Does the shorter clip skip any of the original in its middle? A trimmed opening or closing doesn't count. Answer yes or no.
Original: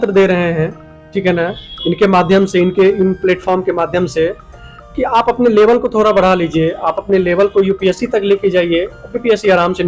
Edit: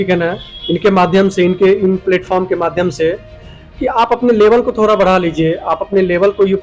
no